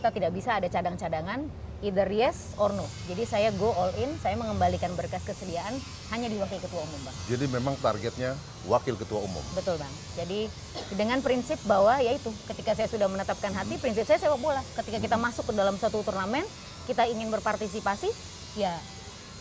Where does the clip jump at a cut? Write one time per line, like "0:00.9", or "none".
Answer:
none